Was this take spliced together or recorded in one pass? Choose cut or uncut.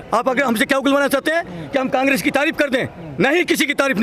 uncut